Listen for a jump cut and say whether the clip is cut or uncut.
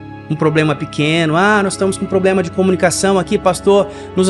uncut